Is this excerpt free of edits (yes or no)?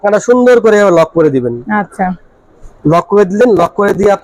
yes